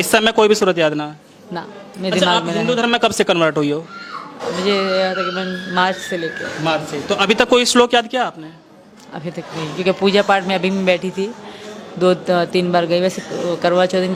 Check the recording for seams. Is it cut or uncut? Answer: uncut